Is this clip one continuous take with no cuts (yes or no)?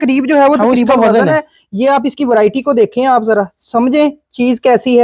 yes